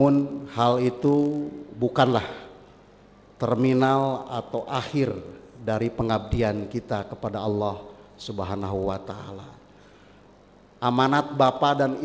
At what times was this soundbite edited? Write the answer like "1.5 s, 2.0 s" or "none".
10.2 s